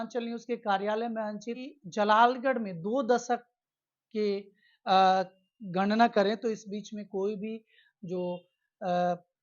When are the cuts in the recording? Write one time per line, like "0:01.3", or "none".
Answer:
0:01.6